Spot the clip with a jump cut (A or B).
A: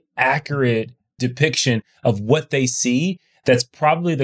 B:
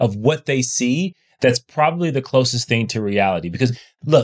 A